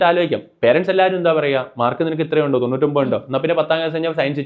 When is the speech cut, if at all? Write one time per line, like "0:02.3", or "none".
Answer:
none